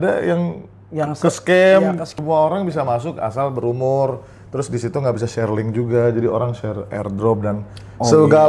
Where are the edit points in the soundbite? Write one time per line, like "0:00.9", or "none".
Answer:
0:02.1